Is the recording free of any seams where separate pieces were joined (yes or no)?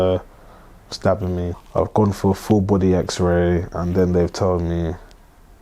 no